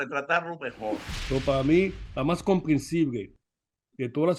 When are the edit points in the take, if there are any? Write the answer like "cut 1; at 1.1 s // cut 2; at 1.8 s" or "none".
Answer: cut 1; at 1.1 s